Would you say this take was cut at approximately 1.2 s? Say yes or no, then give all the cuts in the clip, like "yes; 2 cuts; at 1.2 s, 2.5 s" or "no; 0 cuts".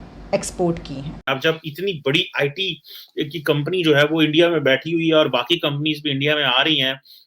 yes; 1 cut; at 1.2 s